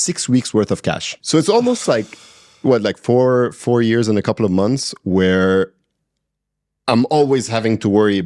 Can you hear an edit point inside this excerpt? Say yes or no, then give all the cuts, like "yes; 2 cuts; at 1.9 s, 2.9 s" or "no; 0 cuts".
yes; 1 cut; at 1.1 s